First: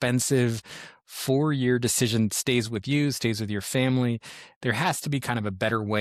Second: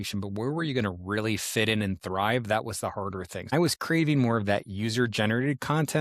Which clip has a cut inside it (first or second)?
second